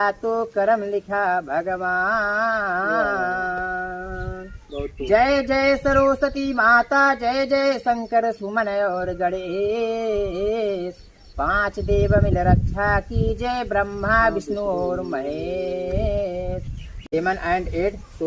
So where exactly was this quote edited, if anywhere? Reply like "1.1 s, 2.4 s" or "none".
16.9 s